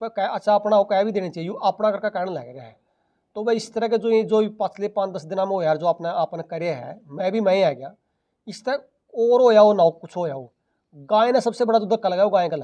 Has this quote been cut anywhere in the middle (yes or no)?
no